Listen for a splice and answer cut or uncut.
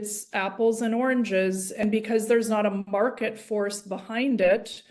cut